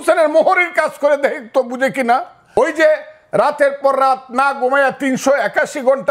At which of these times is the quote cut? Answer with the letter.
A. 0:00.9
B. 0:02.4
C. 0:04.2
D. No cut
B